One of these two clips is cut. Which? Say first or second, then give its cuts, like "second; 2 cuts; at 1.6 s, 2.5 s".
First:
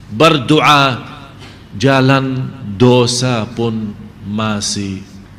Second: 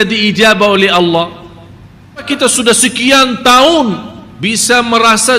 second; 1 cut; at 2.3 s